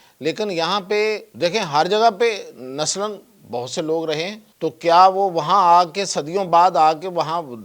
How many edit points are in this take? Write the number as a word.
two